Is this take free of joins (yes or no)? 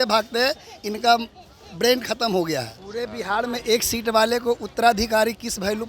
no